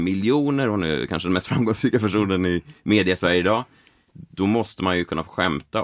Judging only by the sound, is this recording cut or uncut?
uncut